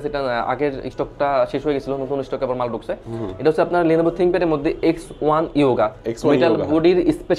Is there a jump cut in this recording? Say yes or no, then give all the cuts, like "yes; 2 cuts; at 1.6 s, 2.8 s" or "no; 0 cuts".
no; 0 cuts